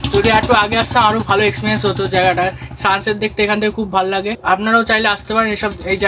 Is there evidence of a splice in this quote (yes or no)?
yes